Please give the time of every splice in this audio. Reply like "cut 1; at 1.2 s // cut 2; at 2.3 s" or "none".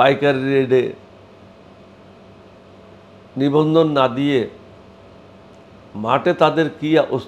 none